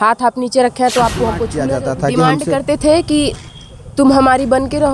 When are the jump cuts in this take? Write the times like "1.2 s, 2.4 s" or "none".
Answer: 1.6 s